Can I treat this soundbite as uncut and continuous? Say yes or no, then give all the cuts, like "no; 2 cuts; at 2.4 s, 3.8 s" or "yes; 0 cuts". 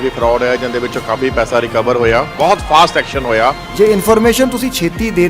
no; 2 cuts; at 2.3 s, 3.6 s